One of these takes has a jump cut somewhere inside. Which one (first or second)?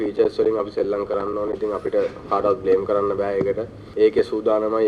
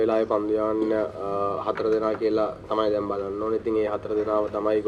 first